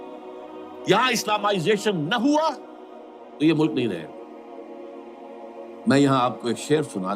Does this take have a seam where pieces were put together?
yes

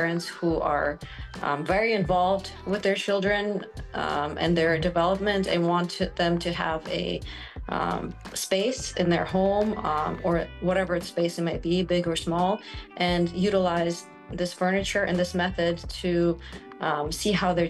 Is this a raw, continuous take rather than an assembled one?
yes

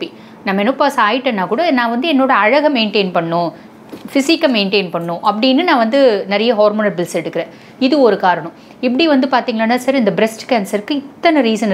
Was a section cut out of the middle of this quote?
no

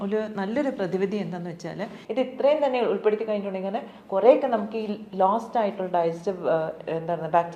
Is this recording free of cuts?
no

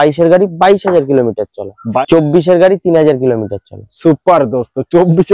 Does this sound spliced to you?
yes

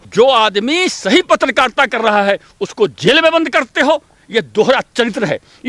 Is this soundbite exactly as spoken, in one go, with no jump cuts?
yes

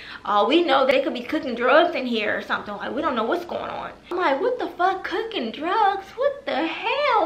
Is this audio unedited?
no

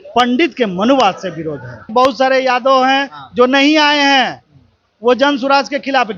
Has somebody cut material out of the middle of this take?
yes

